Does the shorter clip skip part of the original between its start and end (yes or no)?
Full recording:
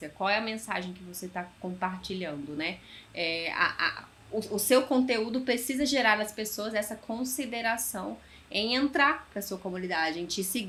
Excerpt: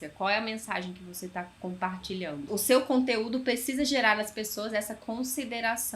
yes